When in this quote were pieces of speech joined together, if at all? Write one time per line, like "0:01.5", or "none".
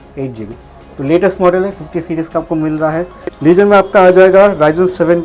0:03.2